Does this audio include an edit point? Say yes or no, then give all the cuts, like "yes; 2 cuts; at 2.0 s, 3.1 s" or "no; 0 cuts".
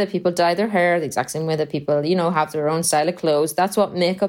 no; 0 cuts